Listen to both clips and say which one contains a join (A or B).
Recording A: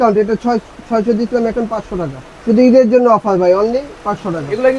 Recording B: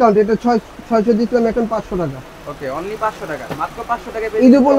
A